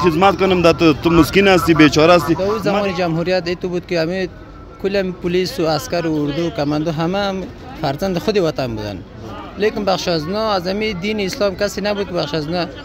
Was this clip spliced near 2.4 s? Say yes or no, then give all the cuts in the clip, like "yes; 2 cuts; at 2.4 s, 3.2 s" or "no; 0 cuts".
yes; 1 cut; at 2.4 s